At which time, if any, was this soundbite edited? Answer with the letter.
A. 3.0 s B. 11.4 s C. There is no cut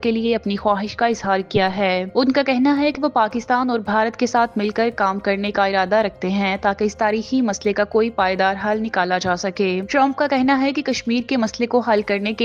C